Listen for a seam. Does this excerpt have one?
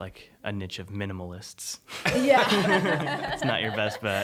no; 0 cuts

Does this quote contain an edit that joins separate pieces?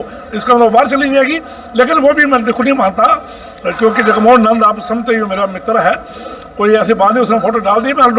no; 0 cuts

